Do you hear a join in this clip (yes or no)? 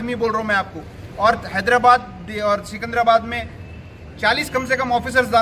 no